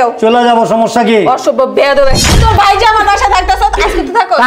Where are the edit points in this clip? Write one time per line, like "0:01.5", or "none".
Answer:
0:02.4